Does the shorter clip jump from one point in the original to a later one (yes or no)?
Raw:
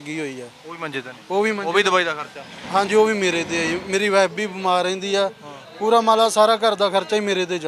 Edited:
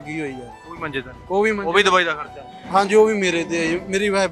no